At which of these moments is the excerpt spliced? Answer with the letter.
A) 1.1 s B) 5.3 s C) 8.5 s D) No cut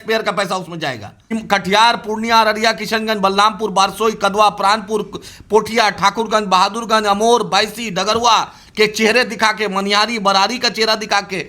A